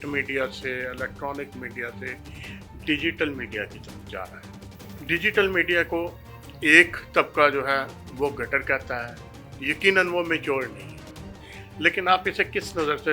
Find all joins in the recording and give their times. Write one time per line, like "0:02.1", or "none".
0:04.3